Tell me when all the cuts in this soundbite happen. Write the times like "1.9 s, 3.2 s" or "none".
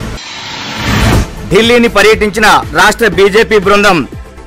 1.2 s